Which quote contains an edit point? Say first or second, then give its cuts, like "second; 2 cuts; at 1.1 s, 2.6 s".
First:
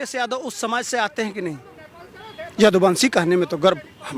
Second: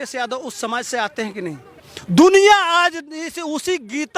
second; 1 cut; at 1.9 s